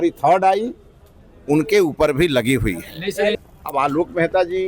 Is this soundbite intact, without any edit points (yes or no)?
no